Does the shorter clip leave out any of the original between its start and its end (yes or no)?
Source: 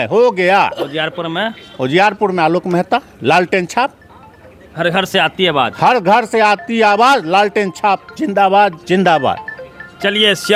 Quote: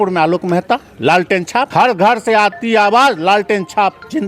yes